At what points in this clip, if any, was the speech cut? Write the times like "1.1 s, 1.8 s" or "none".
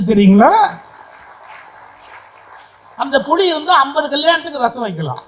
none